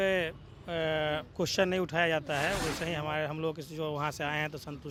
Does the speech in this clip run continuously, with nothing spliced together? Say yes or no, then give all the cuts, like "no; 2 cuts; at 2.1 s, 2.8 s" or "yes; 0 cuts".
yes; 0 cuts